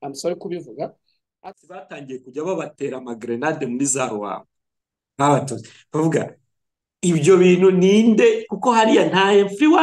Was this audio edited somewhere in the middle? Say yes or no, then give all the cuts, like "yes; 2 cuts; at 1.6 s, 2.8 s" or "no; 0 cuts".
yes; 1 cut; at 1.3 s